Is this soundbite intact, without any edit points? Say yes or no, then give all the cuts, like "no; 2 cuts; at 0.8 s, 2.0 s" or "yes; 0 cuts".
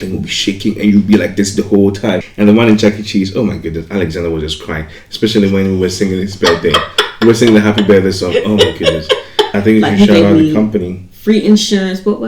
no; 2 cuts; at 2.3 s, 9.5 s